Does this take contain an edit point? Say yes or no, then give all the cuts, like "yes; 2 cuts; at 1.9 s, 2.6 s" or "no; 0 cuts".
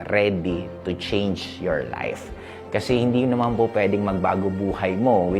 no; 0 cuts